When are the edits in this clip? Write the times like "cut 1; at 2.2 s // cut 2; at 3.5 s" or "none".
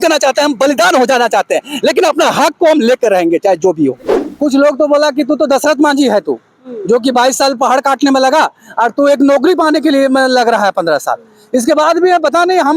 cut 1; at 4.2 s